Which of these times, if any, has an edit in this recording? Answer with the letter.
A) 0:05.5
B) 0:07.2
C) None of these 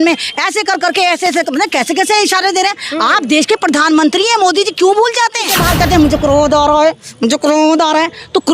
A